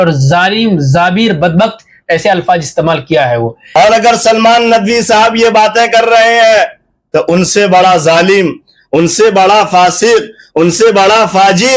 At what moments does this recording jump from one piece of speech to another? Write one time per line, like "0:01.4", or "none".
0:03.6